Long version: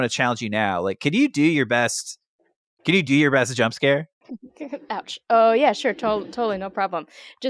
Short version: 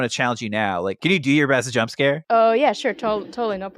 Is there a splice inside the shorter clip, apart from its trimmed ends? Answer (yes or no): yes